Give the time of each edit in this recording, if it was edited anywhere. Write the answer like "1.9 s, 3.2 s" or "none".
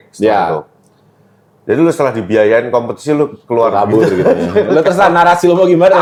none

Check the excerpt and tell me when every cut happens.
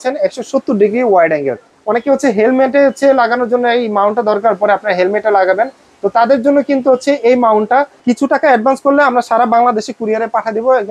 1.7 s, 8.0 s

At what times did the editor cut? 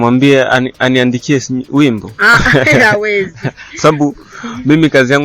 none

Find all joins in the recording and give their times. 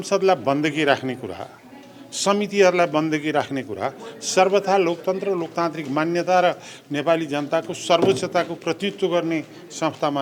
none

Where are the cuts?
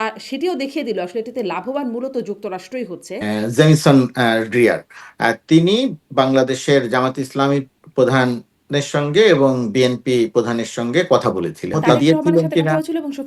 3.1 s, 11.8 s

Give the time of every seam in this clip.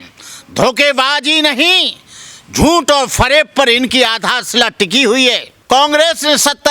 5.5 s

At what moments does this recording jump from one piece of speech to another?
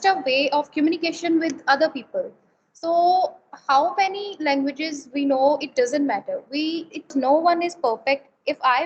7.1 s

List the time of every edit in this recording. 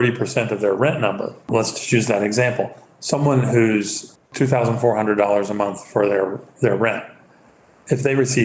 1.5 s

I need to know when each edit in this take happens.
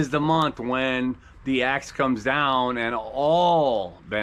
none

